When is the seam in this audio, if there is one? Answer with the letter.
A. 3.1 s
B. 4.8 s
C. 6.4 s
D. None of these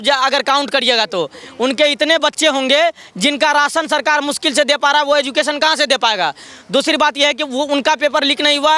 D